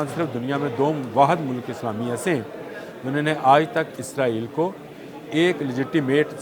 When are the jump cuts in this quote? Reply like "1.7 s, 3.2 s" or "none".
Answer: none